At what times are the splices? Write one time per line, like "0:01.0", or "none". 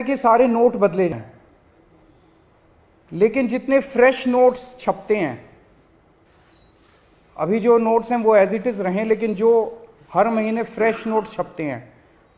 0:01.1